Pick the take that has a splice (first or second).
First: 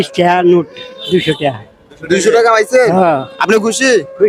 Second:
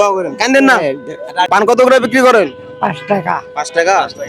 second